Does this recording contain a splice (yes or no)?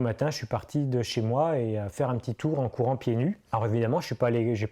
no